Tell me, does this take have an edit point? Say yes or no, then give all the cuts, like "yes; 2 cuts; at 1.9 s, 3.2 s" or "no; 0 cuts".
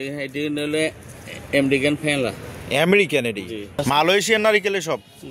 yes; 1 cut; at 3.8 s